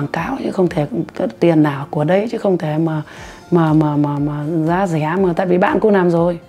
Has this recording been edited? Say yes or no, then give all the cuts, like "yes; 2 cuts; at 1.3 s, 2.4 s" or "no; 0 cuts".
no; 0 cuts